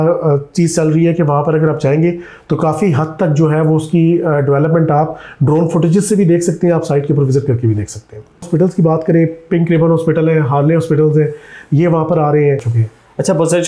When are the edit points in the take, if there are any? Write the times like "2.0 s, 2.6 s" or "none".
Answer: 8.5 s, 12.7 s